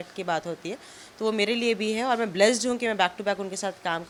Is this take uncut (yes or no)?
yes